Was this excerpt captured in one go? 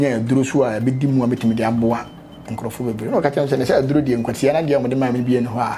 yes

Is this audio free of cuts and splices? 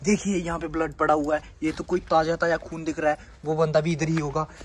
yes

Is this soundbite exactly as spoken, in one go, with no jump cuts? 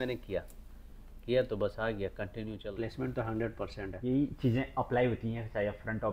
no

